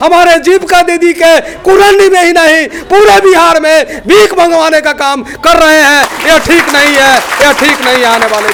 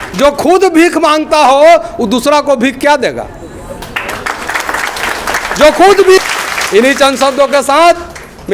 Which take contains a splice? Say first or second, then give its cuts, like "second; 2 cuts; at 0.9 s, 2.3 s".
second; 1 cut; at 6.2 s